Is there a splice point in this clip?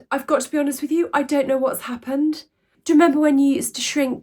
yes; 1 cut; at 2.7 s

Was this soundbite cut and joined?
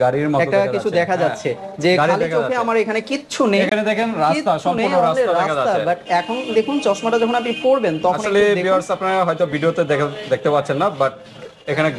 no; 0 cuts

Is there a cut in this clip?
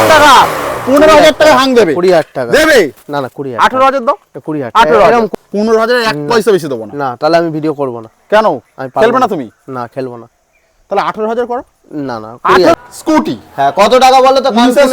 yes; 2 cuts; at 5.3 s, 12.7 s

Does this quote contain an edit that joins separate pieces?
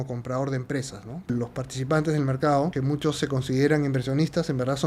yes; 2 cuts; at 1.3 s, 2.7 s

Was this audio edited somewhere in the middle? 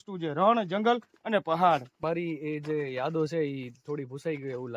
yes; 1 cut; at 2.0 s

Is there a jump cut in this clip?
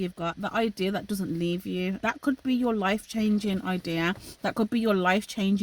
yes; 1 cut; at 2.0 s

